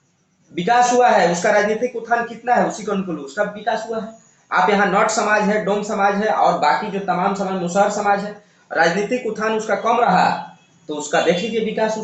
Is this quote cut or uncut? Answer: uncut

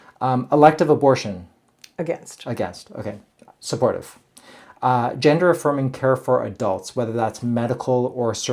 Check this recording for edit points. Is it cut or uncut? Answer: uncut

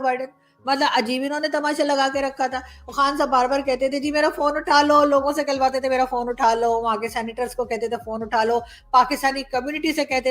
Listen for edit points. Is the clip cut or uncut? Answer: uncut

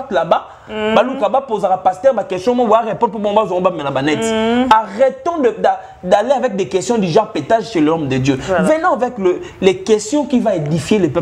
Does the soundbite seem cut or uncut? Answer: uncut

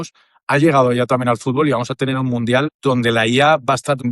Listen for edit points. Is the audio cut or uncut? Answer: cut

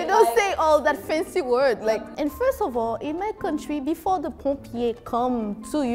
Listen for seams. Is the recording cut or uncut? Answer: cut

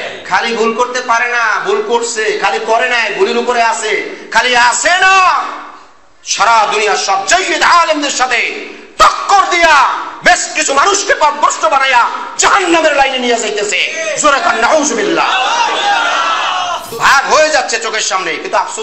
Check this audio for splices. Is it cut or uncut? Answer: cut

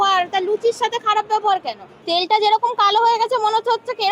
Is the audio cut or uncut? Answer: cut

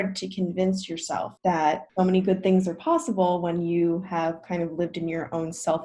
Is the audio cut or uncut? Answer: cut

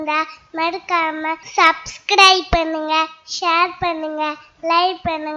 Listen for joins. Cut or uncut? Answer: cut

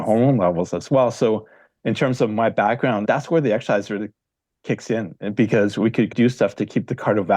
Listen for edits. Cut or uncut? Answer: cut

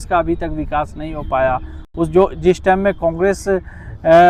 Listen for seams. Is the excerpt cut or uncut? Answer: uncut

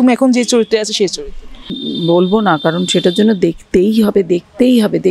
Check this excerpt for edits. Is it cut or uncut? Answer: cut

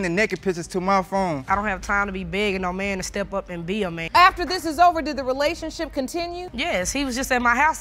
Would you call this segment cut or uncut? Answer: cut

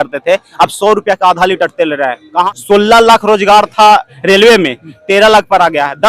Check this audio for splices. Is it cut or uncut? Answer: cut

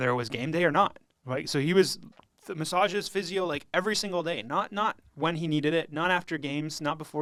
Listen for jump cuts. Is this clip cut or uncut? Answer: uncut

